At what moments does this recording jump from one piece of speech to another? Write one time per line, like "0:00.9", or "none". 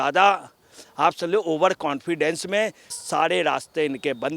0:03.0